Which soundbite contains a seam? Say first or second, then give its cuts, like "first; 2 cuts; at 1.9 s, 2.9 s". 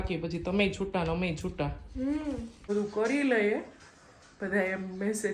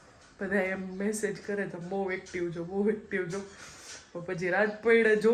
first; 1 cut; at 2.6 s